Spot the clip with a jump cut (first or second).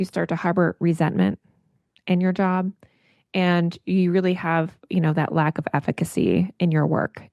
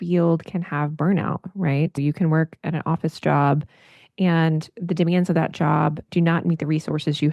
second